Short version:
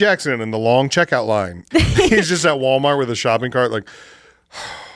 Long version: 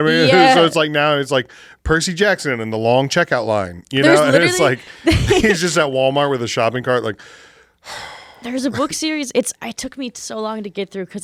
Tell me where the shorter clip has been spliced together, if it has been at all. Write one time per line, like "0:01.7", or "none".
0:01.6